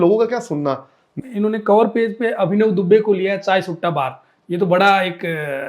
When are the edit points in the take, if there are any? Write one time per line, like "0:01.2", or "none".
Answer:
0:01.1